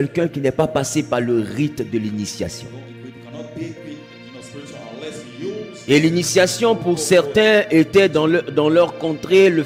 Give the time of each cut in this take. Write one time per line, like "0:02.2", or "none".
none